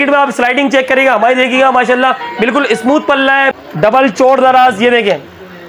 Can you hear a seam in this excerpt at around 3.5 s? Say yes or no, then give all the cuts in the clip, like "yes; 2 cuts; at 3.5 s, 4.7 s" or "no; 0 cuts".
yes; 1 cut; at 3.5 s